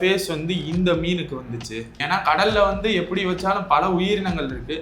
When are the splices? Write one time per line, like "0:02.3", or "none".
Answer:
0:01.9